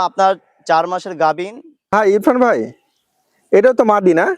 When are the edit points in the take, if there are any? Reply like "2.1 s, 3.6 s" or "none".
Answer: 1.9 s